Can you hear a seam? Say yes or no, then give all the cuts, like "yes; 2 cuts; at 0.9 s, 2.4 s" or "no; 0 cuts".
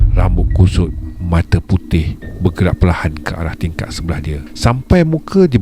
yes; 1 cut; at 4.5 s